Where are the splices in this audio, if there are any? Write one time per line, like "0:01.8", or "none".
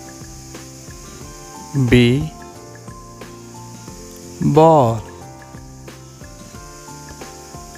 0:01.7
0:02.9
0:04.4
0:05.4